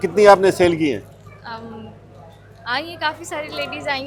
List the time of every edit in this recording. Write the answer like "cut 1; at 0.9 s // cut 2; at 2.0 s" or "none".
none